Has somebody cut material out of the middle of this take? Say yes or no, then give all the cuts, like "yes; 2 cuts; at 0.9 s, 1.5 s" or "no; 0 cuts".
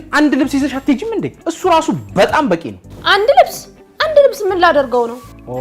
yes; 1 cut; at 1.3 s